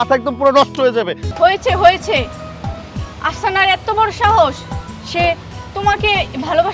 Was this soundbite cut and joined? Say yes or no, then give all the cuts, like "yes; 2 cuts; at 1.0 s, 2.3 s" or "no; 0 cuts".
yes; 1 cut; at 1.2 s